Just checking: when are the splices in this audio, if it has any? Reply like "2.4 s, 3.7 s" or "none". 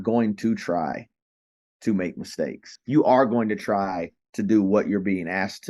2.7 s